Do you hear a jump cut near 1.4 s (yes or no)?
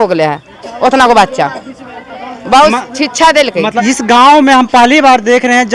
no